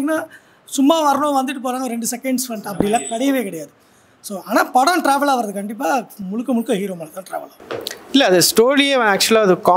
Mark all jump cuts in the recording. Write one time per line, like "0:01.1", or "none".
0:07.6